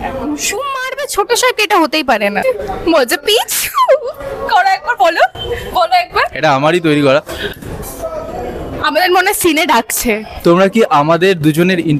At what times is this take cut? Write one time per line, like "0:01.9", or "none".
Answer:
0:02.4